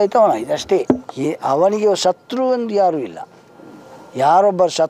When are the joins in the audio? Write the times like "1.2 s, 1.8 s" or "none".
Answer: 1.1 s